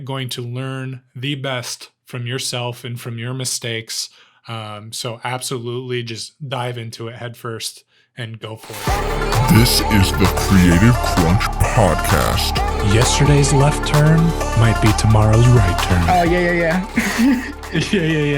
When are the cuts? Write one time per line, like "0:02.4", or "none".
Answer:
0:08.7